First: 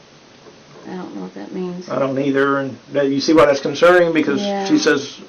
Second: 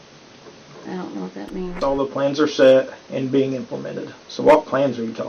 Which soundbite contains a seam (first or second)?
second